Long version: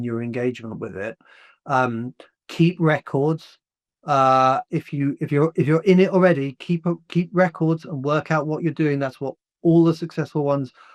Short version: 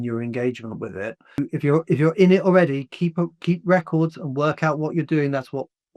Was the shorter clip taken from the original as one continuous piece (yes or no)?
no